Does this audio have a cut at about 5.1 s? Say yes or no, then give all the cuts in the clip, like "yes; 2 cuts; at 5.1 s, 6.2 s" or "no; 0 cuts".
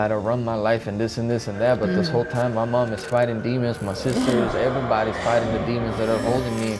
no; 0 cuts